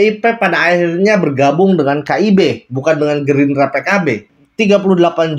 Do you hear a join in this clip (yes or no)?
yes